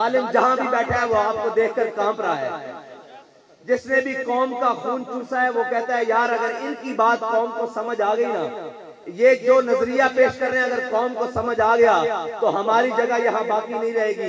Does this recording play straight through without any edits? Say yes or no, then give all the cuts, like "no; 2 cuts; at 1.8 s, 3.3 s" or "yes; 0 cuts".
yes; 0 cuts